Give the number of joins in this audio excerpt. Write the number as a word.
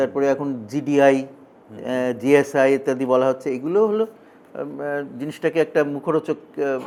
zero